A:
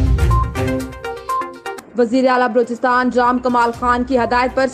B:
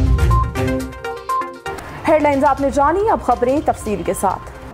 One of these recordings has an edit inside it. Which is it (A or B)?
A